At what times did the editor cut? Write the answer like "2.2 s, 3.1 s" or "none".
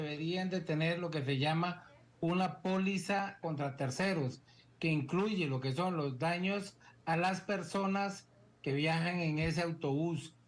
3.4 s